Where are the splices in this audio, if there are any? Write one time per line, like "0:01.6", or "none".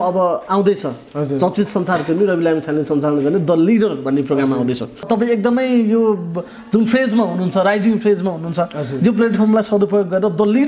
0:05.1

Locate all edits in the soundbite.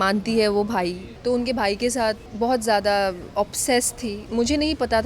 0:01.1
0:02.3
0:04.2

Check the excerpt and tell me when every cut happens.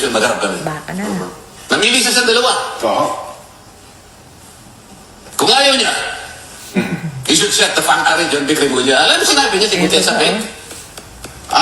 0:08.1

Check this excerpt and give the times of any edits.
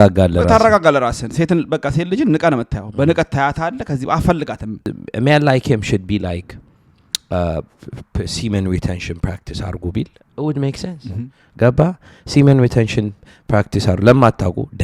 0:05.0

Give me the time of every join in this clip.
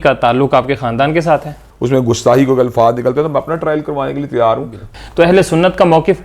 0:01.6
0:04.8

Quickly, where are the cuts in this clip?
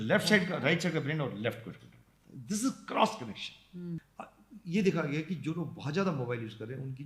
0:04.1

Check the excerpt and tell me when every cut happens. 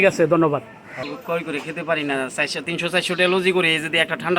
0:01.1

